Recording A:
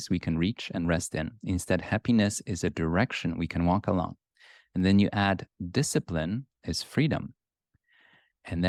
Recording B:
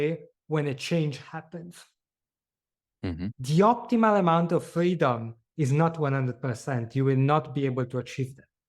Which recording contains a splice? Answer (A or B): B